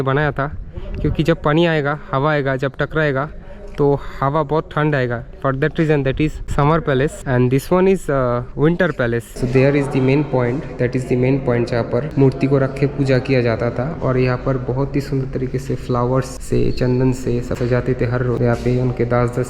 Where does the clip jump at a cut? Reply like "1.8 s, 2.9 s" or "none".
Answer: 6.4 s, 7.2 s, 9.3 s, 12.1 s, 16.4 s, 17.6 s, 18.4 s

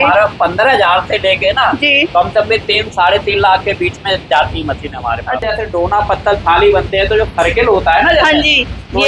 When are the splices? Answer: 5.5 s

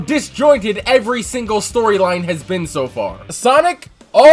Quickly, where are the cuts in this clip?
3.2 s

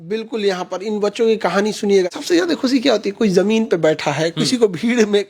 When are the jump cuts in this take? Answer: 2.1 s

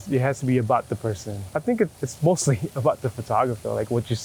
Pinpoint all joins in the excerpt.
1.3 s, 1.9 s

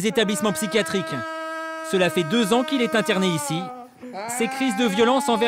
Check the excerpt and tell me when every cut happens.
none

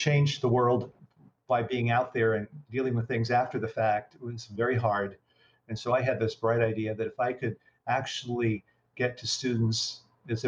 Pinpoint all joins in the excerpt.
0.9 s

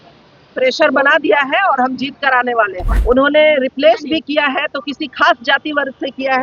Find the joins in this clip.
2.9 s

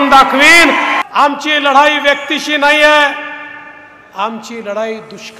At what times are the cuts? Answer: 1.0 s

